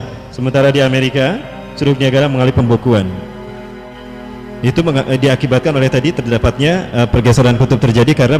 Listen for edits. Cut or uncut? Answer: uncut